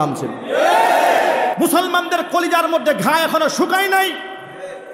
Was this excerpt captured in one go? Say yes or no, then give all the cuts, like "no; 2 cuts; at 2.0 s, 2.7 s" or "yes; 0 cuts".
no; 1 cut; at 1.5 s